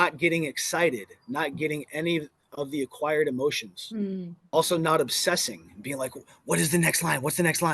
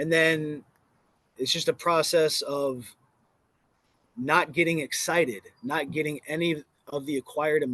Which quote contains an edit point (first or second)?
first